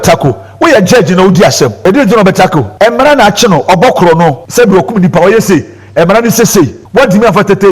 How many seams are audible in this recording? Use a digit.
4